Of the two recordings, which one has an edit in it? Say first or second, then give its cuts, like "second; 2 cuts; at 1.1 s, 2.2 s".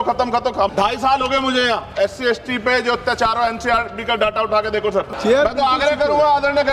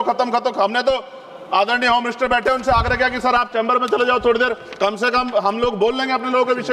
first; 2 cuts; at 0.7 s, 5.1 s